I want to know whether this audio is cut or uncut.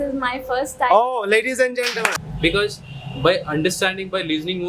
cut